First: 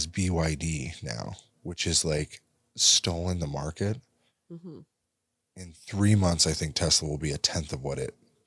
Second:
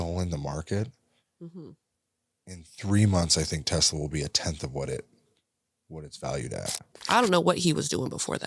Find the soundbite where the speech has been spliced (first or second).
second